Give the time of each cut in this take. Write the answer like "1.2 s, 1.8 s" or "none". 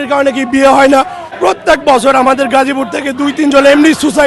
1.3 s

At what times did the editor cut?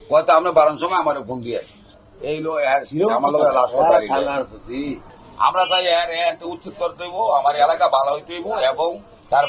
none

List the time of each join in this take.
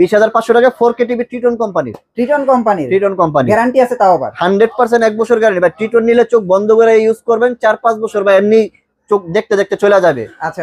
none

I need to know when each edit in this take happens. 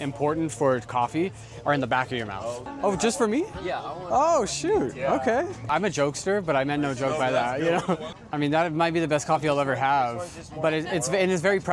2.7 s, 5.7 s, 8.1 s

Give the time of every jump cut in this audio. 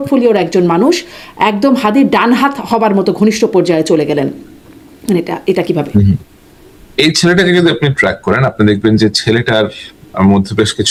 none

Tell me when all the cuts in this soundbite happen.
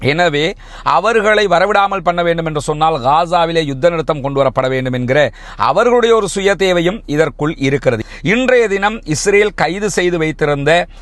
8.0 s

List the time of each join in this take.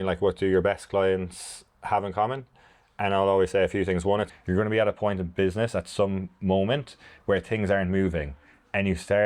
4.3 s

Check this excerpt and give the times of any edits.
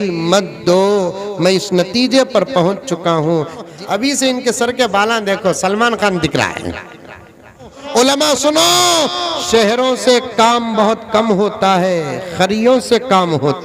3.7 s, 7.8 s

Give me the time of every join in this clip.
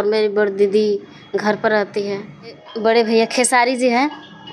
2.7 s

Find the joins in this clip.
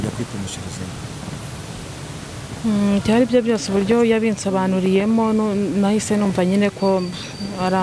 none

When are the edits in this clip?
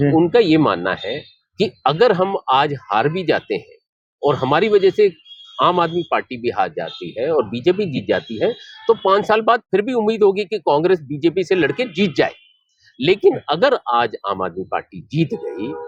none

